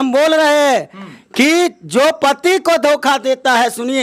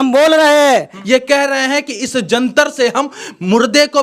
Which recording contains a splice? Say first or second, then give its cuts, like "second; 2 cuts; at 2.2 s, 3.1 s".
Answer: second; 1 cut; at 0.9 s